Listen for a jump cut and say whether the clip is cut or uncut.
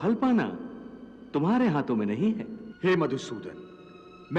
cut